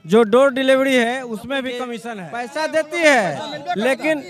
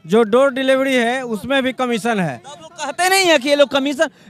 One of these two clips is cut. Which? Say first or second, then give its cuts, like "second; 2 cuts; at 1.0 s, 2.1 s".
first; 1 cut; at 2.6 s